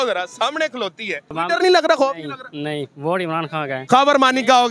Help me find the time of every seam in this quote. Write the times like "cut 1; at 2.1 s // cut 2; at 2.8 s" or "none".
cut 1; at 1.3 s // cut 2; at 3.7 s